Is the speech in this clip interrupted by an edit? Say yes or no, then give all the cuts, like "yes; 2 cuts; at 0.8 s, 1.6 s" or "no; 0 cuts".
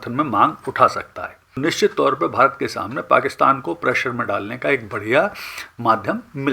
yes; 1 cut; at 1.6 s